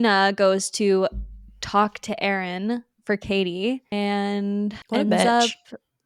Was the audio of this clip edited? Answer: yes; 2 cuts; at 3.9 s, 4.8 s

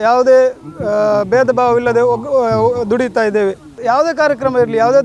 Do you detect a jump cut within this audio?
yes; 1 cut; at 3.7 s

